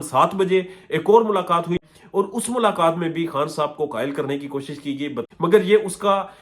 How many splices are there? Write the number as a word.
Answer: two